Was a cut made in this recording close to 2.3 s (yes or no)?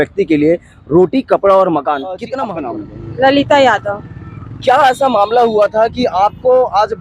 yes